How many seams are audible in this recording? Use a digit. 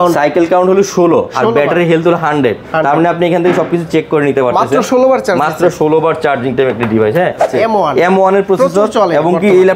1